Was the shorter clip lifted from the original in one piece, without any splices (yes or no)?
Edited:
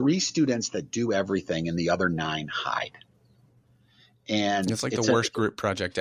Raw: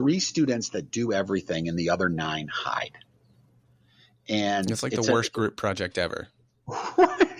yes